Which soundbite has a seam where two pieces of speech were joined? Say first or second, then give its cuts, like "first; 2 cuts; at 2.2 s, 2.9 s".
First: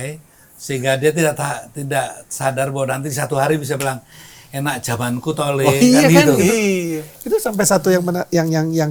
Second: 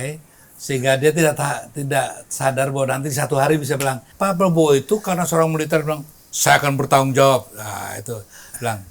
second; 1 cut; at 4.1 s